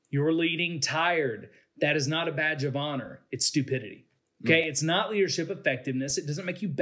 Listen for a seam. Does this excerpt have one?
no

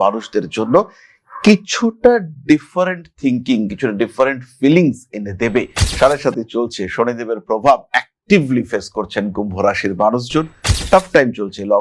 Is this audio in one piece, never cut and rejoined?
no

